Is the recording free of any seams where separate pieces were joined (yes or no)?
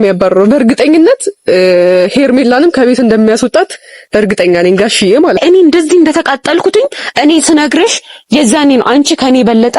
no